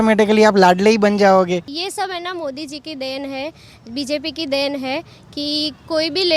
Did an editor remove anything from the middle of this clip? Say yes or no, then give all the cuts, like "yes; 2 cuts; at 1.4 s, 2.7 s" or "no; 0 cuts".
yes; 1 cut; at 1.8 s